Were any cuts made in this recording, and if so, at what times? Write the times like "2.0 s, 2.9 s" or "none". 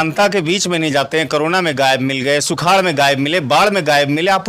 none